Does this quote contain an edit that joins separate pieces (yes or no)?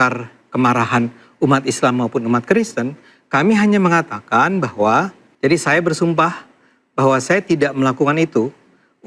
yes